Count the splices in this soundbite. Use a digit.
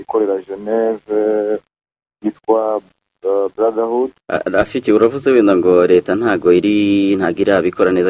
1